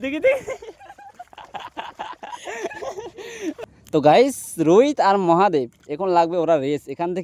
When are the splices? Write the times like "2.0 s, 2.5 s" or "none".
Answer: 3.6 s